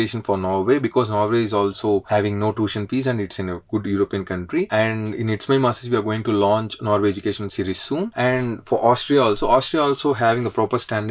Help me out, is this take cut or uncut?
uncut